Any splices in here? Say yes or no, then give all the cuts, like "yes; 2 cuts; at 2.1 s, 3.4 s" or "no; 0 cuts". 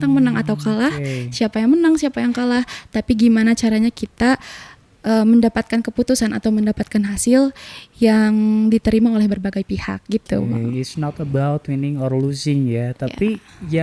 no; 0 cuts